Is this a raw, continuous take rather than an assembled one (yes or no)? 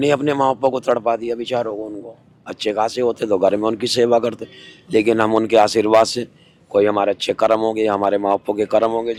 yes